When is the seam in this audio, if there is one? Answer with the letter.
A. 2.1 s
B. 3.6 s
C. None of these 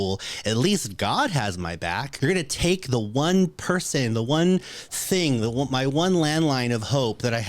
A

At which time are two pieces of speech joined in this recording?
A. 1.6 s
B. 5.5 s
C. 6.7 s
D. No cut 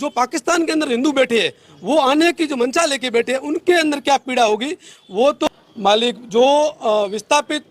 B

